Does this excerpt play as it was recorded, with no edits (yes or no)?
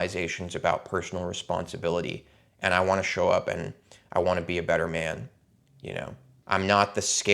no